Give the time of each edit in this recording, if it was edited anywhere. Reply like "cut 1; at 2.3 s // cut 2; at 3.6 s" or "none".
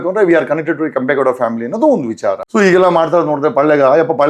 cut 1; at 2.4 s